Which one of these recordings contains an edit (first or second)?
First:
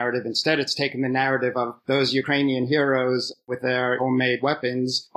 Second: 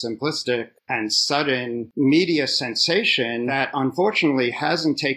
second